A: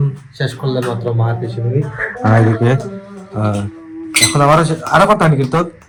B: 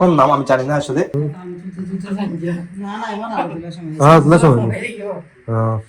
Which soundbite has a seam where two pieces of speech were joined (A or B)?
B